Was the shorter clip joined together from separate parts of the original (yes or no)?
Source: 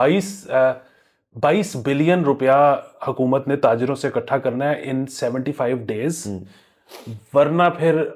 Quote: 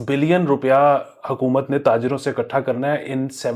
no